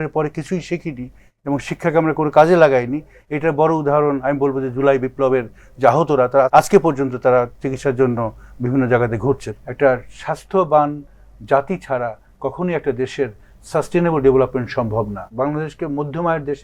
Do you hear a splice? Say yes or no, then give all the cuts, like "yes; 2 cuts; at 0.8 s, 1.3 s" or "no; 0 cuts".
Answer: yes; 3 cuts; at 6.5 s, 9.5 s, 15.2 s